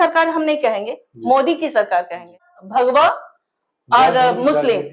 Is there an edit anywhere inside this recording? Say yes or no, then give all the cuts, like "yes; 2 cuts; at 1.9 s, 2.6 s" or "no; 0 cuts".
yes; 1 cut; at 2.5 s